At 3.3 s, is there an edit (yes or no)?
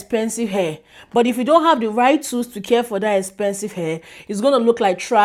no